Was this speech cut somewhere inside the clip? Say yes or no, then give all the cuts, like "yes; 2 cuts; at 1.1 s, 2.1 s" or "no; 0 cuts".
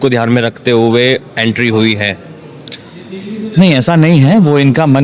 no; 0 cuts